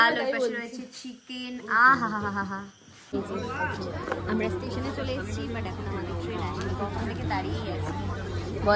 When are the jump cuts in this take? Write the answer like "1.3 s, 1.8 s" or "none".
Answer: 3.1 s